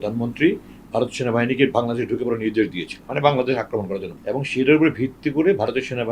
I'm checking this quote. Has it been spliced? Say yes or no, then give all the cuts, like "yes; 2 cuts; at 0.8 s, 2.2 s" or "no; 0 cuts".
yes; 2 cuts; at 3.1 s, 4.1 s